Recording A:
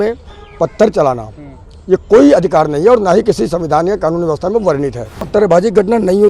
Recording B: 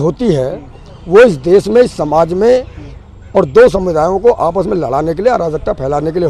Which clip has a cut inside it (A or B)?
A